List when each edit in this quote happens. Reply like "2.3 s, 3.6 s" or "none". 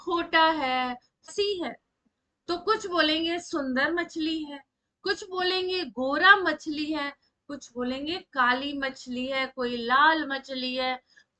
1.3 s